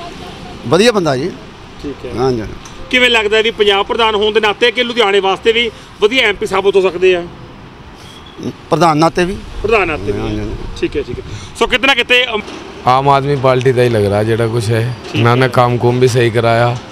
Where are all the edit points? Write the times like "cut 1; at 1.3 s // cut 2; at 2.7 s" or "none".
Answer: cut 1; at 12.4 s